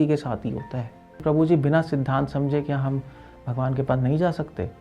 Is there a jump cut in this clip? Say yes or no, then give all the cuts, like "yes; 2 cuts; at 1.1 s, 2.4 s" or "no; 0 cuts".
yes; 1 cut; at 1.2 s